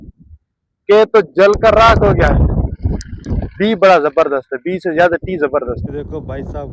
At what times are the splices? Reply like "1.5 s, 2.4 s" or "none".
5.8 s